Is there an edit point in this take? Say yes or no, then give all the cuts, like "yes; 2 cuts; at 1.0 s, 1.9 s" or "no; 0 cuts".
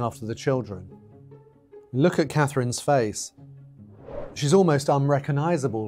yes; 1 cut; at 4.9 s